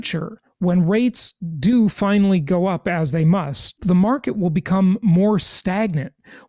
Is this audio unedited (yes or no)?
no